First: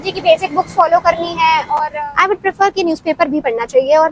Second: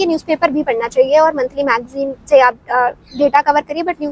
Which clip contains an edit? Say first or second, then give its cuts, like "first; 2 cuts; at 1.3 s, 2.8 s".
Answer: first; 1 cut; at 1.9 s